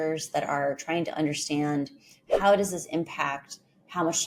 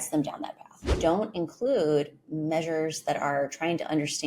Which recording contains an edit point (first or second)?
second